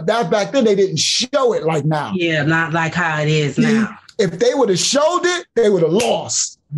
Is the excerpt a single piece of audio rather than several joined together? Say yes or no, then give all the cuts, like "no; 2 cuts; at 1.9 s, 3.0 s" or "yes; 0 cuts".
yes; 0 cuts